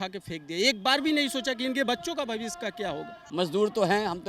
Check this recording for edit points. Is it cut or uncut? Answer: cut